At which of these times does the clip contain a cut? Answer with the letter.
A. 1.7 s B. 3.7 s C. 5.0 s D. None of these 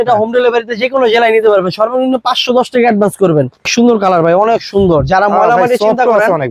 B